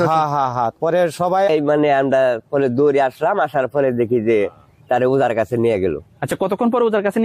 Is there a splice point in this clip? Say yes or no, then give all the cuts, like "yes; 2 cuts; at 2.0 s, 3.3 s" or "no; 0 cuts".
yes; 1 cut; at 1.5 s